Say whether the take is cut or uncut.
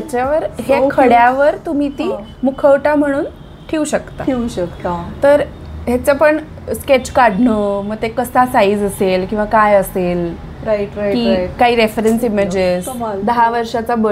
cut